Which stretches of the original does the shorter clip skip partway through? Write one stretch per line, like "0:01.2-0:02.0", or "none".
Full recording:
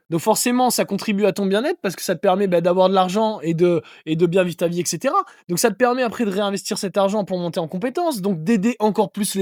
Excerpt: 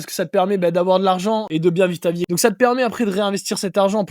0:03.4-0:04.0
0:04.8-0:05.4